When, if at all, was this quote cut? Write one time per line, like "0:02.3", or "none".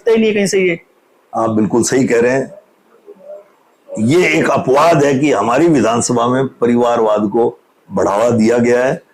none